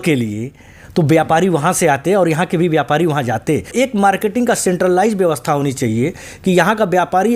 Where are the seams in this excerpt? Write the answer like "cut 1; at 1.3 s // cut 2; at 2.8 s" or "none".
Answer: cut 1; at 3.7 s